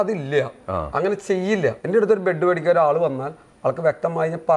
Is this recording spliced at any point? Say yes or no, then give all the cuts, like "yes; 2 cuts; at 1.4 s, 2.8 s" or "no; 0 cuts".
yes; 1 cut; at 1.8 s